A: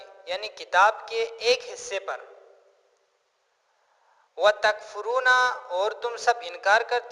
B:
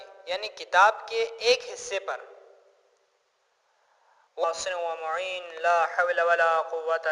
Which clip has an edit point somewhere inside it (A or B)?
A